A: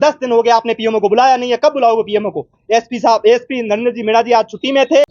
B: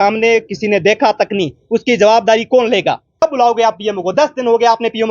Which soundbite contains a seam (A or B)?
B